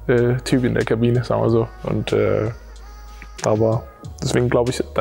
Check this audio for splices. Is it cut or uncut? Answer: uncut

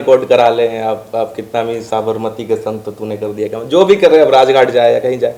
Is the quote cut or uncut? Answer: uncut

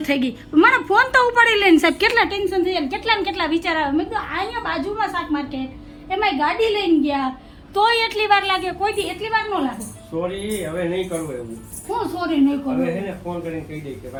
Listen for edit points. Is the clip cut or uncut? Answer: uncut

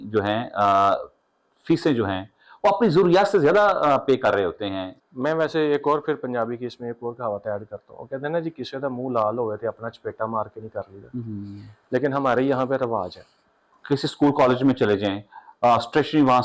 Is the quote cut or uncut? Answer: cut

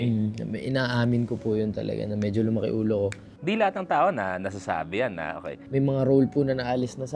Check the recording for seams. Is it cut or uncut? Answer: cut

